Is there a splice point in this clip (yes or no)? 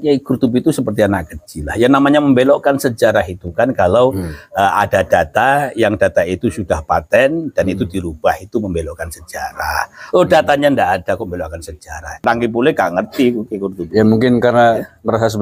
yes